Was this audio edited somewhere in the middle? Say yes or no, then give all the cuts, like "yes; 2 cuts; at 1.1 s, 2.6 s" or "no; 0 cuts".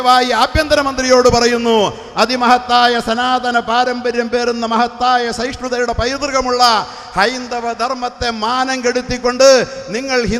no; 0 cuts